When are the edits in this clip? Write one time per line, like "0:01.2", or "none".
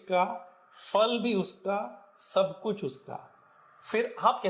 none